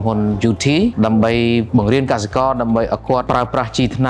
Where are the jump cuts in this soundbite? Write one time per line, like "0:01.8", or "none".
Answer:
0:00.9
0:01.7
0:03.2